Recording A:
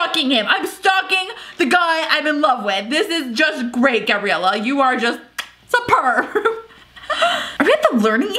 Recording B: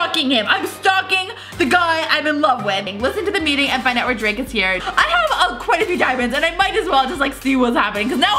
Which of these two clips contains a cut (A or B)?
B